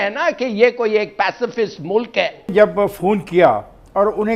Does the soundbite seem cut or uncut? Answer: cut